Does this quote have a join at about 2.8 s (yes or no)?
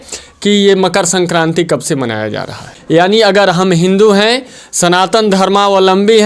yes